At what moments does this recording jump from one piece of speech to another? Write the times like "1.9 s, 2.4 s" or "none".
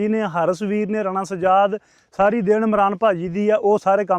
none